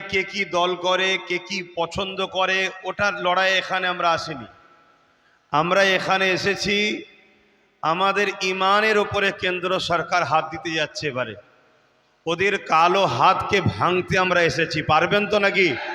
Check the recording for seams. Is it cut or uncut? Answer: uncut